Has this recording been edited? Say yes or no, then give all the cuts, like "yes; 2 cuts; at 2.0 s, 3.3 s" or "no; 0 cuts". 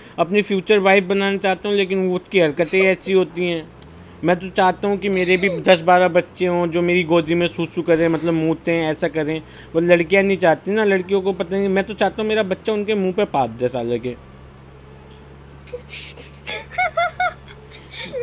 no; 0 cuts